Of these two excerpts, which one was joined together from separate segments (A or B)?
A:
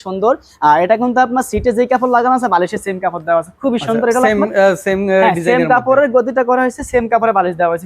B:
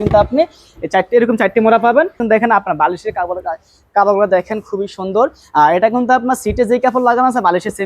B